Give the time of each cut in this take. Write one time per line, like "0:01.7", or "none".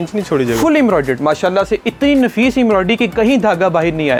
none